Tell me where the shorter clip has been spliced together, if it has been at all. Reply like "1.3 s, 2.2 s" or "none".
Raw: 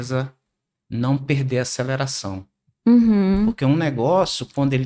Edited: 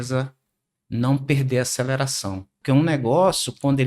2.6 s